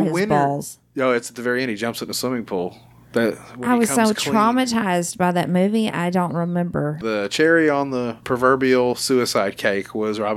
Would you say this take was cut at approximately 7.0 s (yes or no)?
yes